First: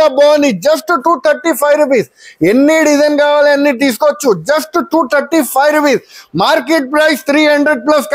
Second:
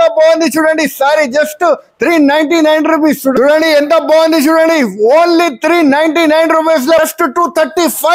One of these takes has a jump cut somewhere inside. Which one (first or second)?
second